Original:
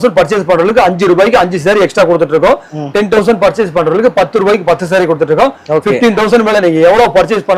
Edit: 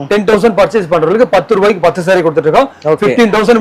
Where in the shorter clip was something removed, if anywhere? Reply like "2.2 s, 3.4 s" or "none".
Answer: none